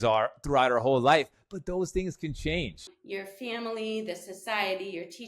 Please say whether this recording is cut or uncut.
cut